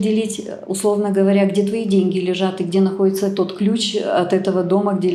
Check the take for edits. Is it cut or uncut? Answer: uncut